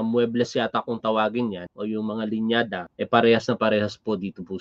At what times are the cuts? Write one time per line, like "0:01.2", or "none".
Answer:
0:01.7
0:02.8